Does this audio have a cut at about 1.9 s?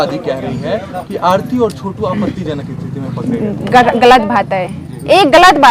no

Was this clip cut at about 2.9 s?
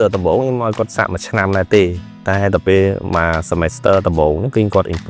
no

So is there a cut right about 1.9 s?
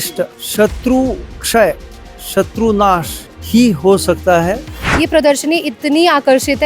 no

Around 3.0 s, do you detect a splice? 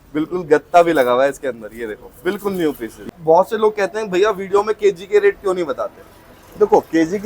yes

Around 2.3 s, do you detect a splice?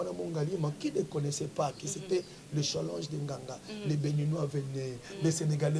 no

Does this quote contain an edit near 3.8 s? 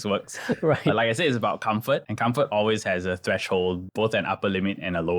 yes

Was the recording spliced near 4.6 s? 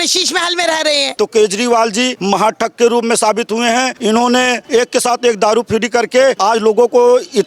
yes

